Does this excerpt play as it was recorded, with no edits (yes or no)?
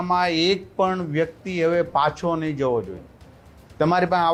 yes